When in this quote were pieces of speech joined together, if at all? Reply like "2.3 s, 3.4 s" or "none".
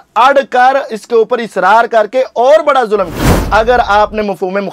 3.5 s